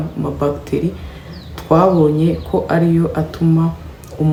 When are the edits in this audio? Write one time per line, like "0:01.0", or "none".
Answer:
none